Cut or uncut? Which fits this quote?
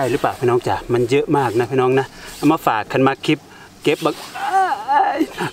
uncut